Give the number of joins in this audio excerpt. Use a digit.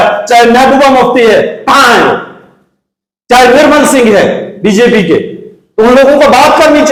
0